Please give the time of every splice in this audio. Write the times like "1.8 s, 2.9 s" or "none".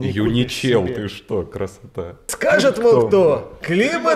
2.3 s

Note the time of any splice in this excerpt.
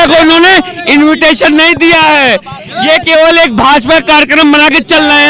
none

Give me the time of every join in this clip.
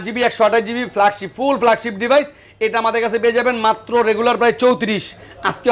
none

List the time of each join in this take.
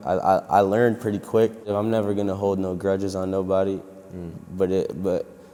none

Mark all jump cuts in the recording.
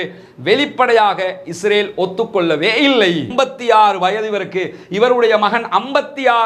3.3 s

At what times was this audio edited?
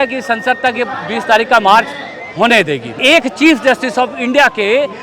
2.9 s

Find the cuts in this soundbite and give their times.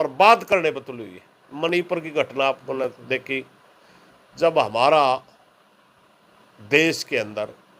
none

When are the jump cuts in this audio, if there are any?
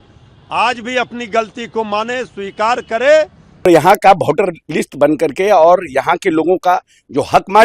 3.7 s

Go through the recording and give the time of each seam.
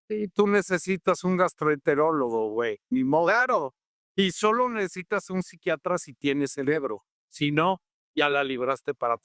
none

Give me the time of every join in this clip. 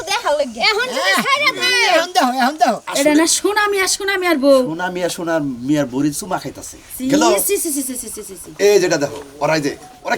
2.8 s

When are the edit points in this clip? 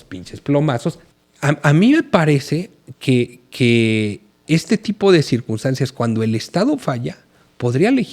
1.0 s

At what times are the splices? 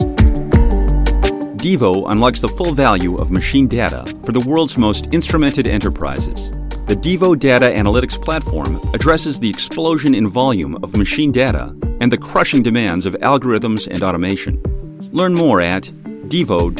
1.6 s

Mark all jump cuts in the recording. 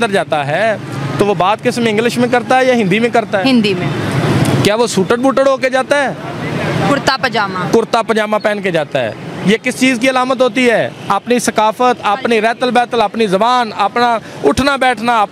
none

